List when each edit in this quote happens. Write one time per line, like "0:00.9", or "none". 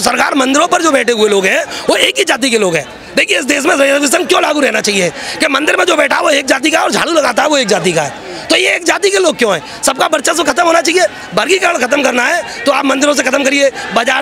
none